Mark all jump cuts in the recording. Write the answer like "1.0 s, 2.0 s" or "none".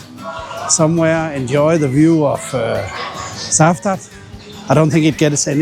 none